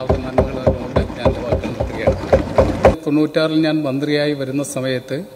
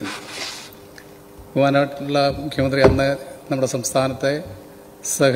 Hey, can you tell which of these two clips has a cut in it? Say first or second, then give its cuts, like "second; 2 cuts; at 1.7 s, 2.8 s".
first; 1 cut; at 3.1 s